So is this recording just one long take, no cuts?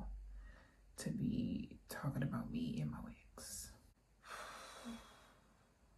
no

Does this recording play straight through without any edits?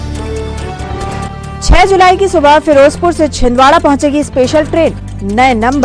yes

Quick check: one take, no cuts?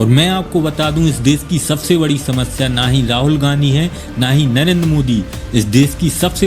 yes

